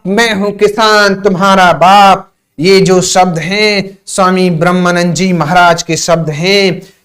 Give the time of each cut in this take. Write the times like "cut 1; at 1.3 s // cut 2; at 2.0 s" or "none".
none